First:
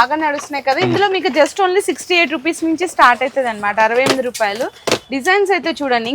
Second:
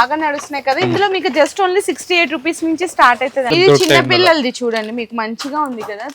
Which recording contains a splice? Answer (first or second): second